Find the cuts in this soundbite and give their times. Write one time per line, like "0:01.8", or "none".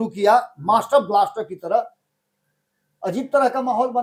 none